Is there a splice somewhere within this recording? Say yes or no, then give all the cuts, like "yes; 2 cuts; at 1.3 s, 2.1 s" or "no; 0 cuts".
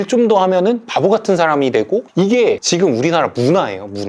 no; 0 cuts